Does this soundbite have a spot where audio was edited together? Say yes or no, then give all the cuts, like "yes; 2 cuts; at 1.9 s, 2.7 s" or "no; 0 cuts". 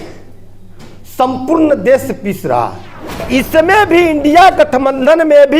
yes; 1 cut; at 3.2 s